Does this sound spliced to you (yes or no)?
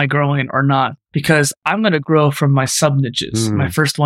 yes